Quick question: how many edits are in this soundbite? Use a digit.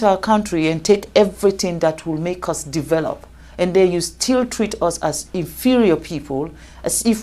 0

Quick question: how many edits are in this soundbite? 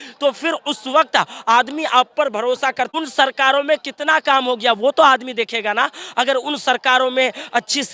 1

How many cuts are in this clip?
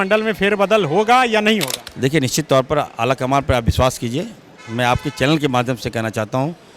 1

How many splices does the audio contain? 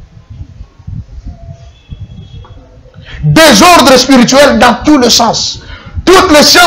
0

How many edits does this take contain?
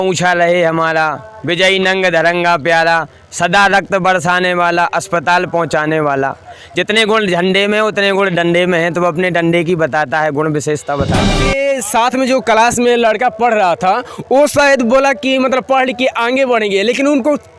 1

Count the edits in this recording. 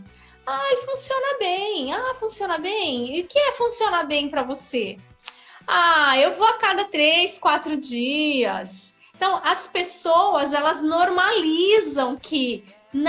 0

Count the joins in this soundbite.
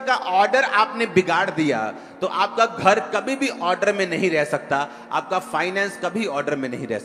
0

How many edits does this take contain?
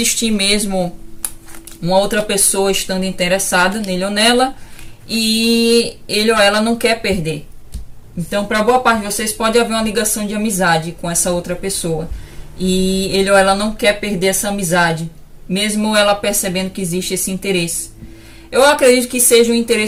0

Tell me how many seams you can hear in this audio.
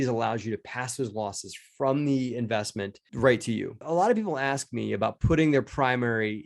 1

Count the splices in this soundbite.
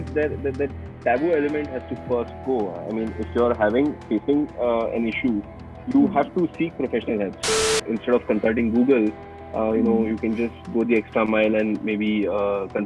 1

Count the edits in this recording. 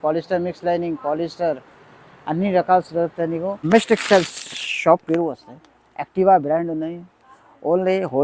1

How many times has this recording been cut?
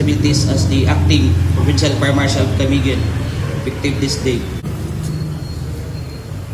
1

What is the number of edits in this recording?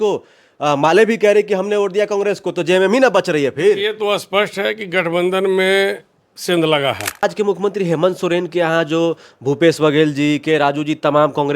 1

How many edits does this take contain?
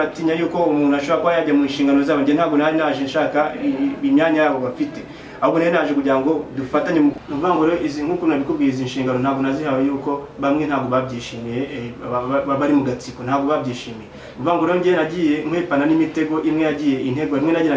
1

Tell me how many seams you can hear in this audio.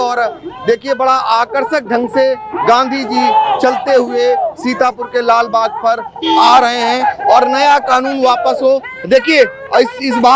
0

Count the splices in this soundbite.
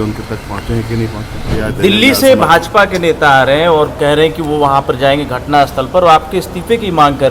1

